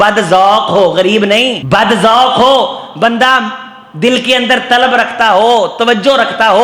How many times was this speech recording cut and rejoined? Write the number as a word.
one